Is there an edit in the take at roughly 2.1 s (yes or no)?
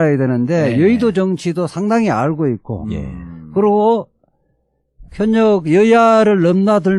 yes